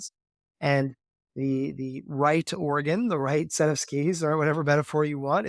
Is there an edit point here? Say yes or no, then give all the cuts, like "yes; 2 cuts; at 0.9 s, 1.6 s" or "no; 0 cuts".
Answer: no; 0 cuts